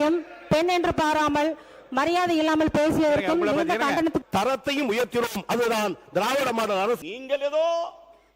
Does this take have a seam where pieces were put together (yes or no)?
yes